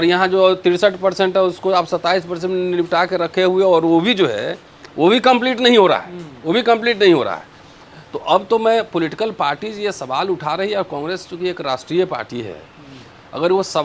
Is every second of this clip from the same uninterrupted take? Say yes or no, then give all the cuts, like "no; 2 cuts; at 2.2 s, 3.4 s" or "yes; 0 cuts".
yes; 0 cuts